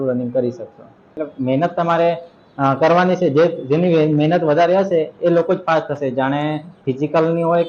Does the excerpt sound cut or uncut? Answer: cut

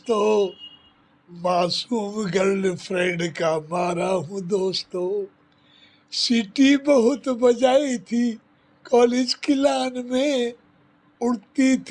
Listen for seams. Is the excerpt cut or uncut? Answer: uncut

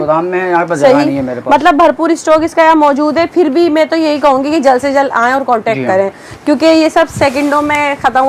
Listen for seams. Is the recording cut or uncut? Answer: uncut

